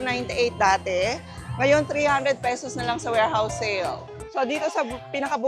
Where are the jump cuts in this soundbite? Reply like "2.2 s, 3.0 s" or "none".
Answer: 4.0 s